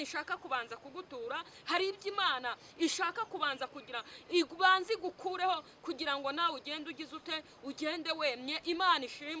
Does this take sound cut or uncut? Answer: uncut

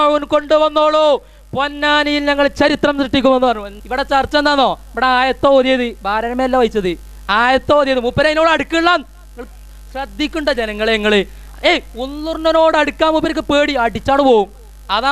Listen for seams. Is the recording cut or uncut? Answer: cut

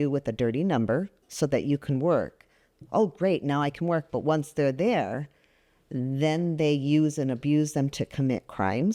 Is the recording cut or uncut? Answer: uncut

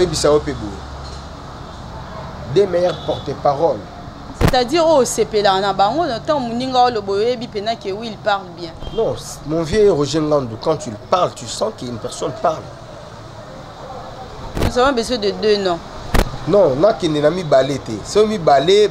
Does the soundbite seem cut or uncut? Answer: uncut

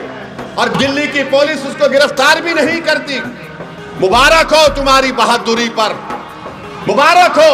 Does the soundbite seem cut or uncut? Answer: uncut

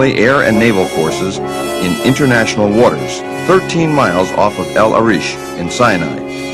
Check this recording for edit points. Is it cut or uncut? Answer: uncut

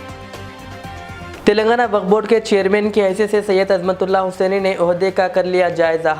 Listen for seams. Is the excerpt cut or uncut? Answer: cut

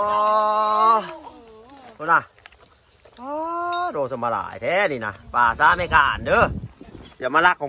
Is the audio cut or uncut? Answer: uncut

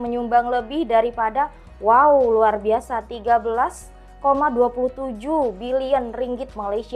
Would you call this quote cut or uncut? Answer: uncut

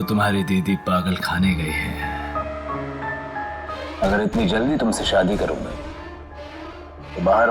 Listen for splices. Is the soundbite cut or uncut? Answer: cut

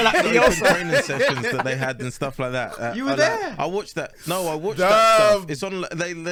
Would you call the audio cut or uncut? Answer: uncut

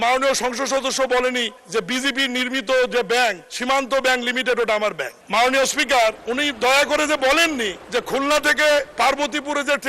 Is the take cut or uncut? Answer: cut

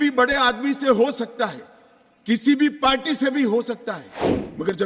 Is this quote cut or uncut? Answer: uncut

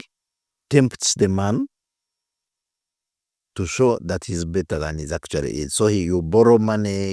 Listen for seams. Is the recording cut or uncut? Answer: uncut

